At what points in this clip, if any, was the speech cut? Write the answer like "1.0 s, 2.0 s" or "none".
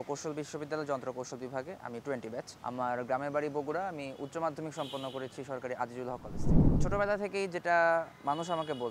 none